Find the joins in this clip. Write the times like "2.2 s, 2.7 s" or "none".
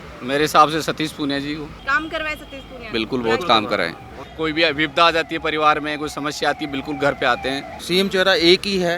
1.8 s, 4.2 s, 7.7 s